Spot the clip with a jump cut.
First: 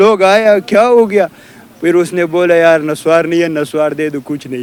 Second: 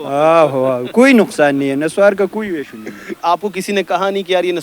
second; 1 cut; at 3.2 s

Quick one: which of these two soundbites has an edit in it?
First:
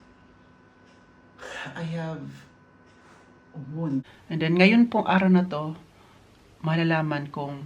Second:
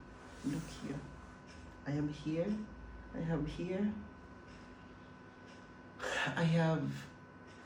first; 1 cut; at 4.2 s

